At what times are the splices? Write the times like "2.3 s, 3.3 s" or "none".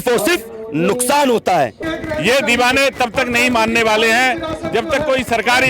1.8 s